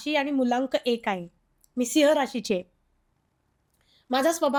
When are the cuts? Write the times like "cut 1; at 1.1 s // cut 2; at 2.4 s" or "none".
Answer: none